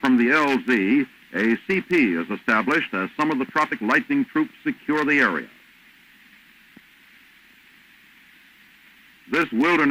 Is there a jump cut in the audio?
yes; 1 cut; at 1.0 s

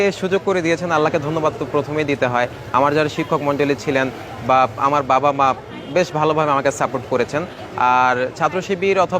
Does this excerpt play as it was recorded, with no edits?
yes; 0 cuts

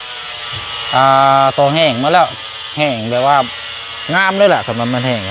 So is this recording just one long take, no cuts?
yes; 0 cuts

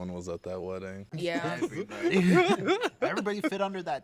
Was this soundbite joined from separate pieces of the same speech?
yes; 1 cut; at 1.0 s

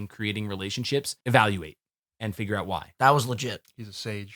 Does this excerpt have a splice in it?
yes; 2 cuts; at 1.1 s, 2.9 s

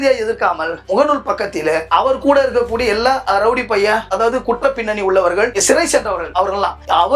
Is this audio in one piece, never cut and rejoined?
yes; 0 cuts

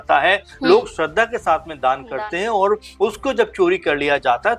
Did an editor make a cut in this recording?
no; 0 cuts

